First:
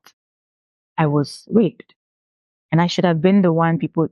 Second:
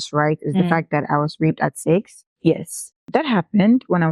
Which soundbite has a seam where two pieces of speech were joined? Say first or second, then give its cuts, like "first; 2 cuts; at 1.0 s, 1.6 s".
second; 2 cuts; at 2.2 s, 2.9 s